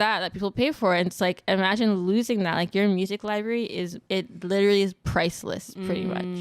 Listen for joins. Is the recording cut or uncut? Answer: cut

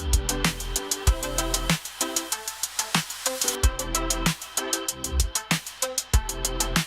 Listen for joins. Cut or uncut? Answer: cut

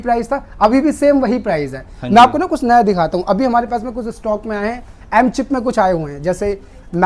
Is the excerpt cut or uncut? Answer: uncut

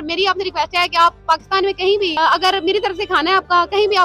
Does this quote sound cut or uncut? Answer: cut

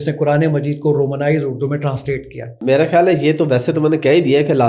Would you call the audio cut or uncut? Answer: cut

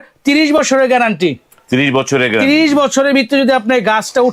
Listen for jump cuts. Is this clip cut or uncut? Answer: uncut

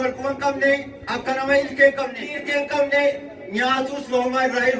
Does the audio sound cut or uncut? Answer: cut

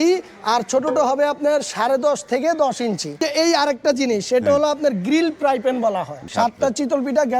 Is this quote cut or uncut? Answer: cut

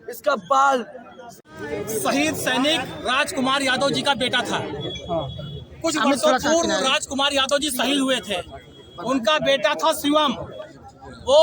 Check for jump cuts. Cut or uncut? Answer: cut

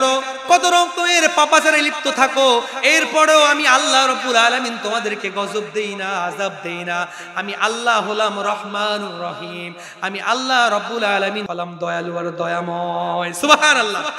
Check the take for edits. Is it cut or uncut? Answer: cut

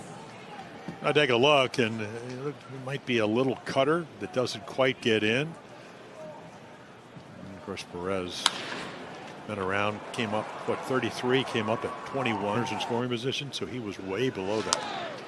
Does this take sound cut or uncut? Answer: cut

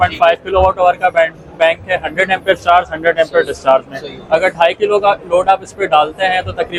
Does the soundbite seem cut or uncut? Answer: uncut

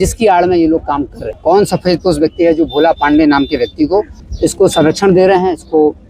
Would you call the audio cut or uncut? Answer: cut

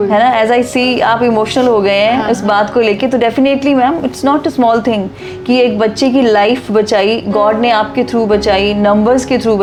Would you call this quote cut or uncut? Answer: uncut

